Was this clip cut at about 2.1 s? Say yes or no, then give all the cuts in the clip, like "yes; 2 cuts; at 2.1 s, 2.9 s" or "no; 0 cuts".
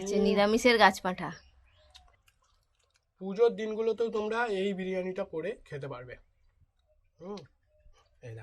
yes; 1 cut; at 2.1 s